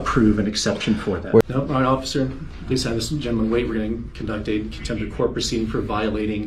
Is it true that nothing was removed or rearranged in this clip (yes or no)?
no